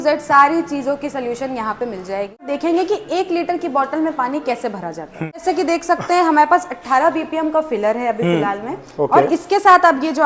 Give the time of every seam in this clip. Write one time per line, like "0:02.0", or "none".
0:02.4
0:05.4